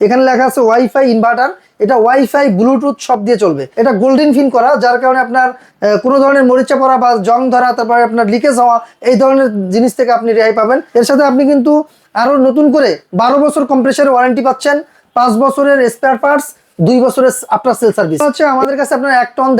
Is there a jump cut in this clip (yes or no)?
yes